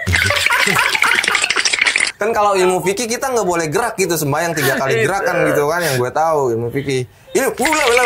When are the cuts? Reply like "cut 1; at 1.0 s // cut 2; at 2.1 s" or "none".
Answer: none